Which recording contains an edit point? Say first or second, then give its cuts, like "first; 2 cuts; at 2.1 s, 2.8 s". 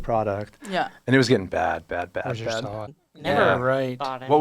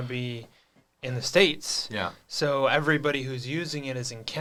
first; 1 cut; at 3.0 s